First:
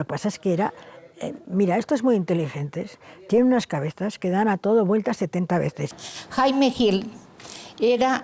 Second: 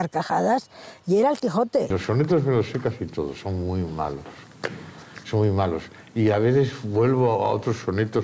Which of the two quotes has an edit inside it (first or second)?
second